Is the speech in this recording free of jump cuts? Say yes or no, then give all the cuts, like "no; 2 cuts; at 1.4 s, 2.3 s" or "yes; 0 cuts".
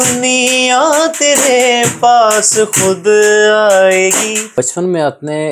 no; 1 cut; at 4.5 s